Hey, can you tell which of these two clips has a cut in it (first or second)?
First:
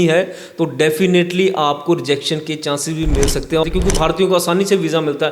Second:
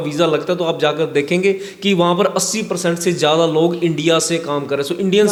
first